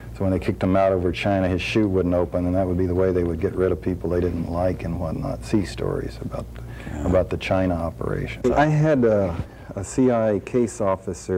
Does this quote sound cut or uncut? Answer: cut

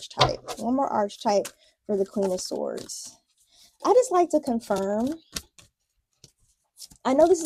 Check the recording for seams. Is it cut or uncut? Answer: uncut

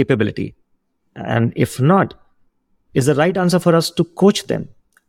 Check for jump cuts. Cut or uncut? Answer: uncut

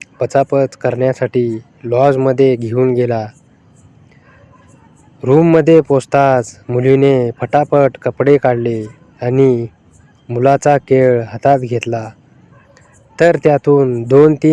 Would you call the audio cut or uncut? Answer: uncut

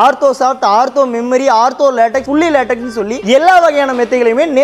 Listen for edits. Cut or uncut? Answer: uncut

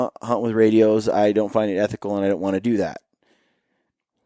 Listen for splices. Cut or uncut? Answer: uncut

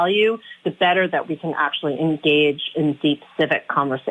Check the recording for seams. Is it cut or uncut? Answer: uncut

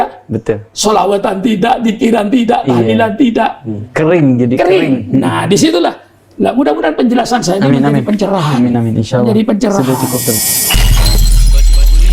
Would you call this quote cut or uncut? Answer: cut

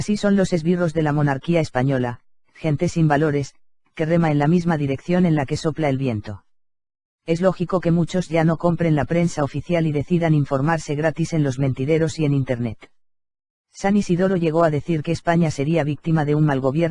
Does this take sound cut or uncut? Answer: uncut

